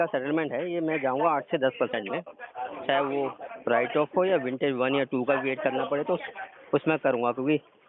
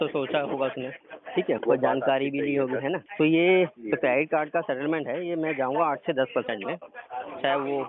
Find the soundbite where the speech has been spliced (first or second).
second